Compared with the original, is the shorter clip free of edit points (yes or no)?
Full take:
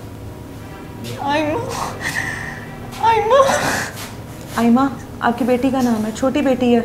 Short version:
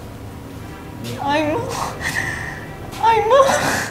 yes